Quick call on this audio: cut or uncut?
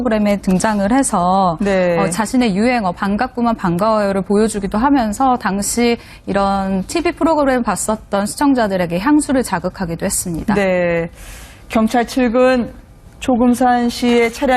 uncut